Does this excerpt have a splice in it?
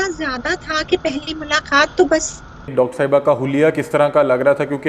yes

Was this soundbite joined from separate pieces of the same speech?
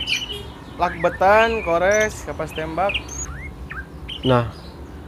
yes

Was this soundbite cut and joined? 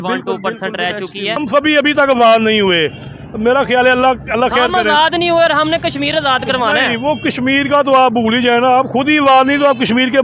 yes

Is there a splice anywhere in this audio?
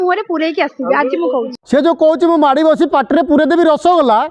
yes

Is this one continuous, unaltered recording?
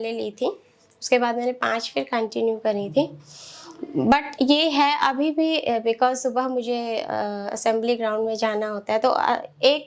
yes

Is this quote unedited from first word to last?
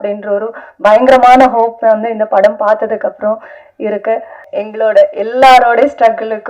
no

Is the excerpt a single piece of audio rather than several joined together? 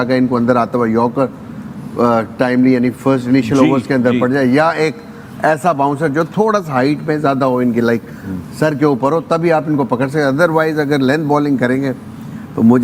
yes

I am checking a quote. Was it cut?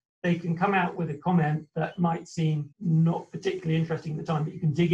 yes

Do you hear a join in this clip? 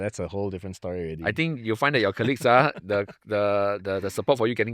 no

